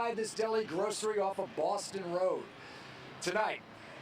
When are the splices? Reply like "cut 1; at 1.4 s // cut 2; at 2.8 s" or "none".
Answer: cut 1; at 1.3 s